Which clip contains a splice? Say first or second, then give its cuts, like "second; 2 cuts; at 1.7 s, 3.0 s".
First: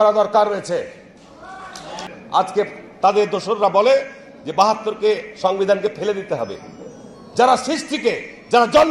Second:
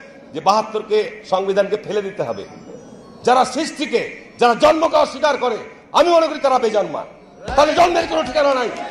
first; 1 cut; at 2.1 s